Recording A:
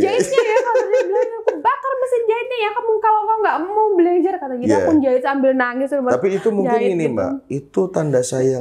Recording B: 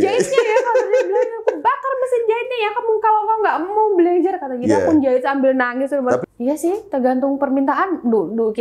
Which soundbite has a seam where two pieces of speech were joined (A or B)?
B